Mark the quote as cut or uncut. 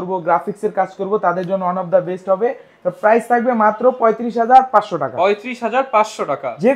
uncut